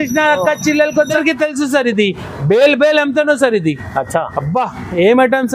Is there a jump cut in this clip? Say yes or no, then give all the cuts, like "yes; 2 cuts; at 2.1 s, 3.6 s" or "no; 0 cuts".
yes; 1 cut; at 1.2 s